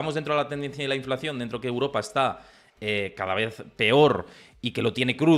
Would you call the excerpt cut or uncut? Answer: uncut